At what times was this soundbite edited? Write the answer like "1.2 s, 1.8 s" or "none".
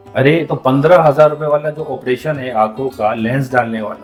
none